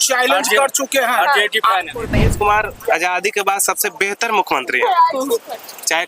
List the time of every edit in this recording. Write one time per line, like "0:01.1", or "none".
0:02.2